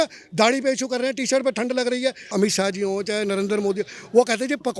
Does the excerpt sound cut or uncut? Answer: cut